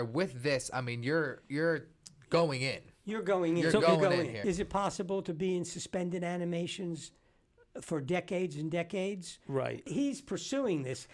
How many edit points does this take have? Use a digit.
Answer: 2